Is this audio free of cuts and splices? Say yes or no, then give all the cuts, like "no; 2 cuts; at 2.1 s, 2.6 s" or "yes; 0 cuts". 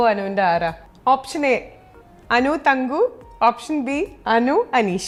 yes; 0 cuts